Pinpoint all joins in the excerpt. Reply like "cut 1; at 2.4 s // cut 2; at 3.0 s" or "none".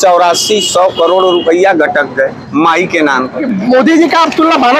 cut 1; at 3.5 s